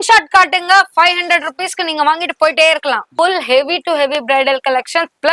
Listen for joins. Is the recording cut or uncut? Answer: cut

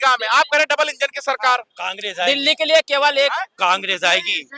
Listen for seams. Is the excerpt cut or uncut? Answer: uncut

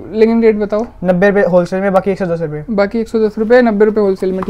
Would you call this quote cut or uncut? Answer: uncut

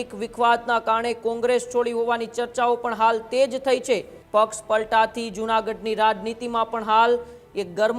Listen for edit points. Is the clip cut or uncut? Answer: cut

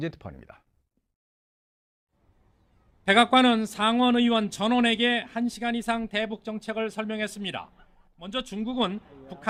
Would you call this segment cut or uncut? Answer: uncut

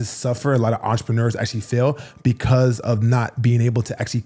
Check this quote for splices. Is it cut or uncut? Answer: uncut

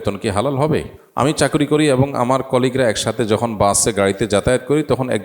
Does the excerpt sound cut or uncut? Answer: cut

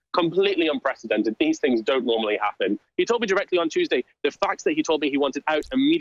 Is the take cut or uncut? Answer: cut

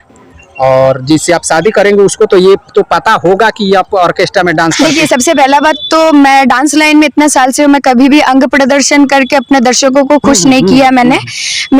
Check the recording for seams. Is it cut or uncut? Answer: cut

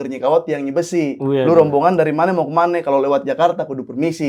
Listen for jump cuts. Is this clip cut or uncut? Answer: uncut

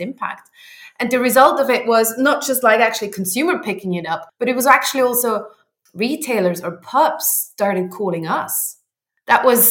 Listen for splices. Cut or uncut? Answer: cut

